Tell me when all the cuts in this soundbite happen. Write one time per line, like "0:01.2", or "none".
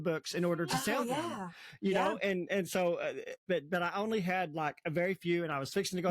0:03.3

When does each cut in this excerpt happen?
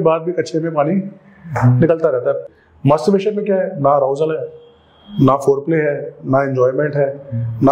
0:02.4

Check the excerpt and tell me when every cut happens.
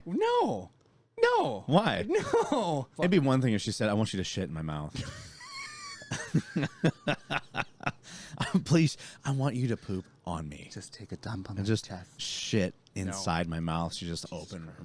0:02.9

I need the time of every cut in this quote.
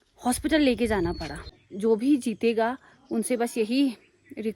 0:01.6

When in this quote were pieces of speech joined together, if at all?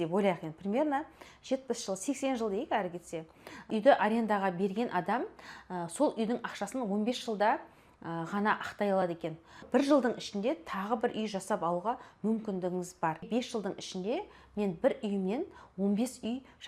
0:03.7
0:09.6
0:13.3

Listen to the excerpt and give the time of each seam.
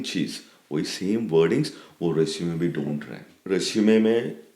0:03.3

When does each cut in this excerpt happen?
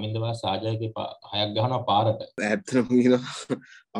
0:02.4

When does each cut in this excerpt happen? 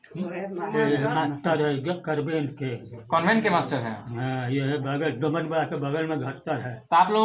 none

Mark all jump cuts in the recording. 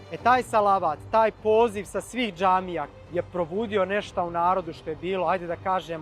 0:02.9

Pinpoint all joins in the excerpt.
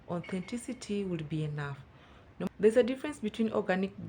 0:02.5

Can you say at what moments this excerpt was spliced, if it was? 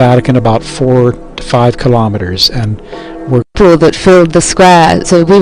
0:04.2

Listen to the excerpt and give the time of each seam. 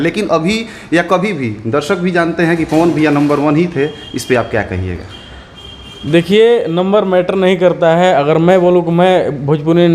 none

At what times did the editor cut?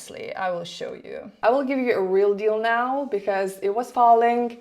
0:01.4

